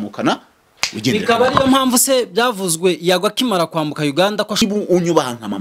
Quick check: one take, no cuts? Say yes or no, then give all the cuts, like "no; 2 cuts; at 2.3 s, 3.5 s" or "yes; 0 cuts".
no; 1 cut; at 4.6 s